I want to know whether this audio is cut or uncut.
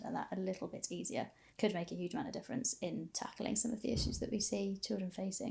cut